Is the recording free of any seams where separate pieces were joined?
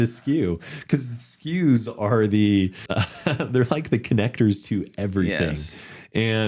no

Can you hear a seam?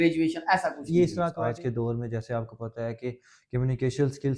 yes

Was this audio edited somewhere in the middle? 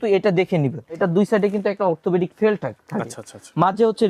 yes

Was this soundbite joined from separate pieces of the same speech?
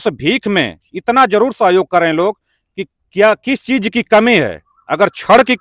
no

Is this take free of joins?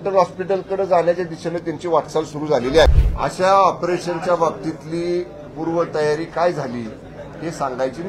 no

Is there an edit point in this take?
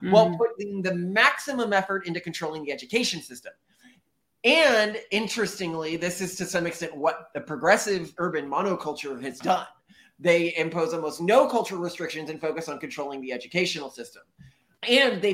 no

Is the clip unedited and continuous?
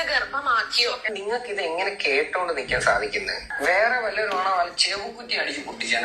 no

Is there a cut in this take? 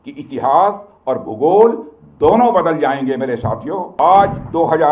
yes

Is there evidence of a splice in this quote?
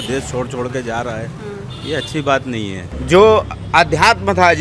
yes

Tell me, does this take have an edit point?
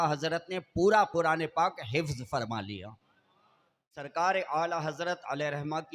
yes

